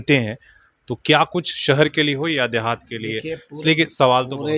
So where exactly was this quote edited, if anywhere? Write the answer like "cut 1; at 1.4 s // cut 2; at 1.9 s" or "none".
none